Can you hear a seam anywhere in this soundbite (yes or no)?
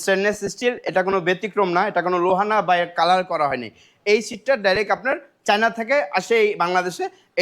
no